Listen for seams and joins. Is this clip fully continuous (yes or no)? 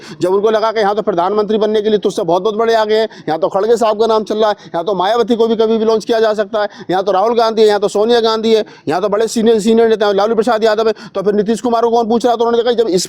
yes